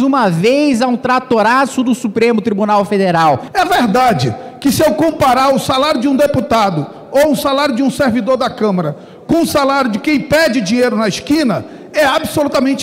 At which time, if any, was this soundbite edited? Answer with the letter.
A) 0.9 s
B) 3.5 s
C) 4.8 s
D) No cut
B